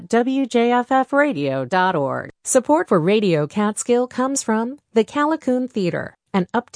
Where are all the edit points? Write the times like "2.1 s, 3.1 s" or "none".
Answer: 2.3 s